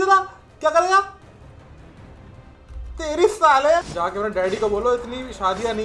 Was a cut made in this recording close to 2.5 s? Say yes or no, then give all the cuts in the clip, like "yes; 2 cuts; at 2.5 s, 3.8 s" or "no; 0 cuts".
no; 1 cut; at 3.9 s